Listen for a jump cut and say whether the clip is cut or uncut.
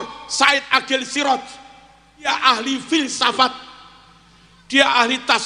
cut